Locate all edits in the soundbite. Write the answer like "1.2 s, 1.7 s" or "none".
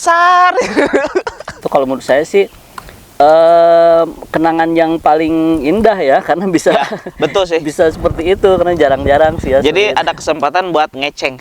1.6 s